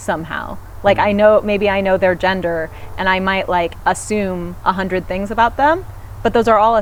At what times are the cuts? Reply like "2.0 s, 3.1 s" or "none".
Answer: none